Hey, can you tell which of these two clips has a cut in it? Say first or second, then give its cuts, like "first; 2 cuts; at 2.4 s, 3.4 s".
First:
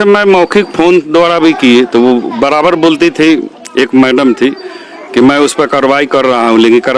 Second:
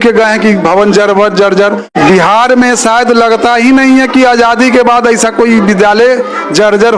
second; 1 cut; at 1.8 s